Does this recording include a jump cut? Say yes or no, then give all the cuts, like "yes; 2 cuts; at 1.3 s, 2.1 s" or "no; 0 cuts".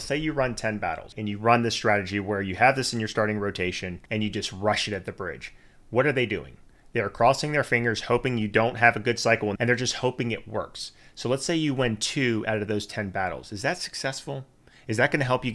yes; 3 cuts; at 1.1 s, 3.9 s, 9.5 s